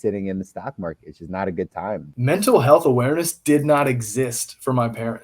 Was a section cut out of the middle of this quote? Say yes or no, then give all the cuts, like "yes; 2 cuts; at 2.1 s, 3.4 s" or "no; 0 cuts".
yes; 1 cut; at 2.1 s